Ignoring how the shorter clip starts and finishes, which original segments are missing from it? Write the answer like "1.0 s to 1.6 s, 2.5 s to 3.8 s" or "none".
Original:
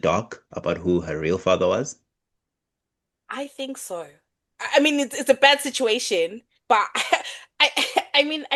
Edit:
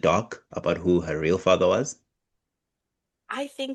none